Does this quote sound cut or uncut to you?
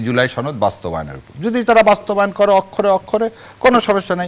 uncut